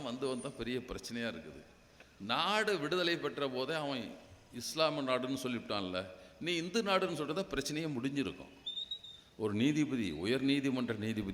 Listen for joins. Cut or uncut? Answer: uncut